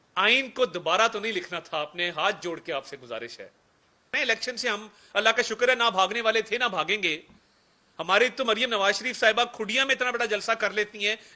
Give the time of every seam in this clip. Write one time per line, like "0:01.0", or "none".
0:04.2